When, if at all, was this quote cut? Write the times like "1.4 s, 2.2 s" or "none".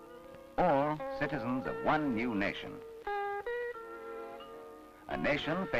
1.0 s